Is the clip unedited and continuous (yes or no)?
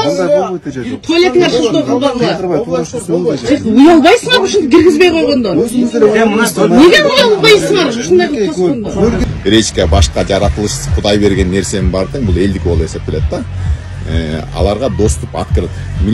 no